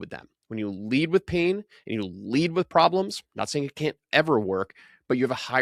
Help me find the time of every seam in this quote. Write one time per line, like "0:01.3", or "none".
none